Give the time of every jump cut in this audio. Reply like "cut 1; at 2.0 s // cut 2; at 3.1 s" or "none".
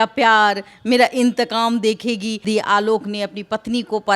cut 1; at 2.4 s

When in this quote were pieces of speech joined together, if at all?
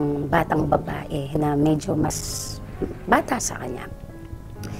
none

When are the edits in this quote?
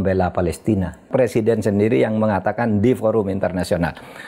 cut 1; at 1.1 s

